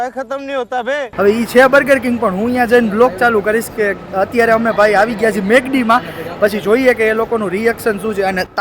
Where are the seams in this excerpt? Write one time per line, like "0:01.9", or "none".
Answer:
0:01.1